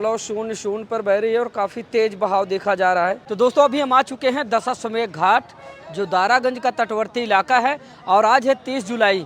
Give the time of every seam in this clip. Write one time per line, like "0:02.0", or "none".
none